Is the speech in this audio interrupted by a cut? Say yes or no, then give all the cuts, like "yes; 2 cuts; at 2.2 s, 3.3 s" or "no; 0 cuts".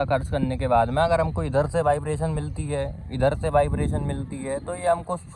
no; 0 cuts